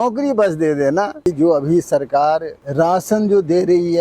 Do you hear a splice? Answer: yes; 2 cuts; at 1.2 s, 2.6 s

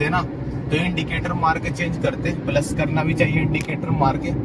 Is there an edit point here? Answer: no; 0 cuts

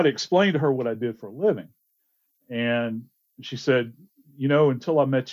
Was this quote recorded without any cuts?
yes; 0 cuts

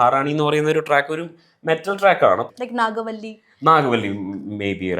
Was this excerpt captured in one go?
no; 1 cut; at 2.4 s

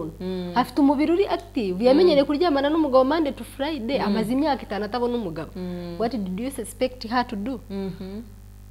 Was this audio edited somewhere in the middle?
no; 0 cuts

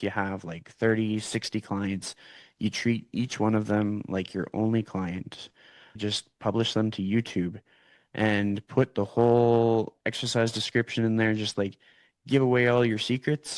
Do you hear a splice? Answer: yes; 1 cut; at 6.0 s

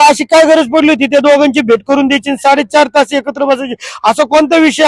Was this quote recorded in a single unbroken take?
yes; 0 cuts

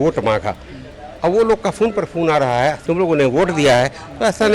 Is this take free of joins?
no; 1 cut; at 2.8 s

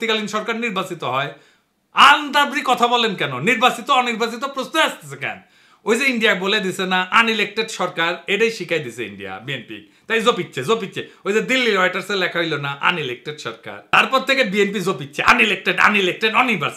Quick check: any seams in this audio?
no; 0 cuts

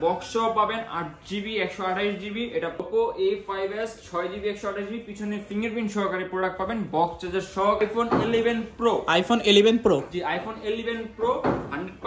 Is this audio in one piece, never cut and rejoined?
no; 2 cuts; at 2.8 s, 7.8 s

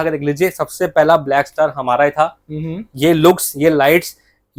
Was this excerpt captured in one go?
yes; 0 cuts

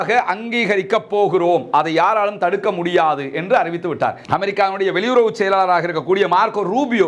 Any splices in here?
yes; 1 cut; at 4.2 s

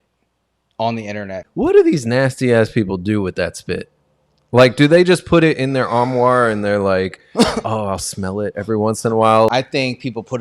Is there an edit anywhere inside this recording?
yes; 2 cuts; at 1.4 s, 9.5 s

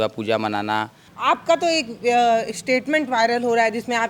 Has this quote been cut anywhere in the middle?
yes; 1 cut; at 1.1 s

